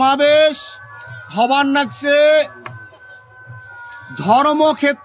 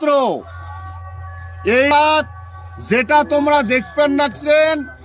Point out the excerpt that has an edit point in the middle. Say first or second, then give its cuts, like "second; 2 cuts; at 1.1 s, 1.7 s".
second; 1 cut; at 1.9 s